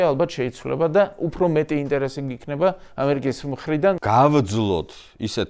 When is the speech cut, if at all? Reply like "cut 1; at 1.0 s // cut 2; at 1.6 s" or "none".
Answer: cut 1; at 4.0 s